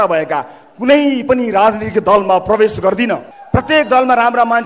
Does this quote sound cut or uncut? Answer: cut